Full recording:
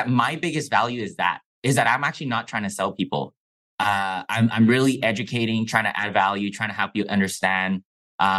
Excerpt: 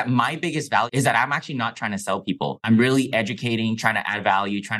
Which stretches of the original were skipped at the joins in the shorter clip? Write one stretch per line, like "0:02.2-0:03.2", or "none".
0:00.9-0:01.6
0:03.4-0:04.5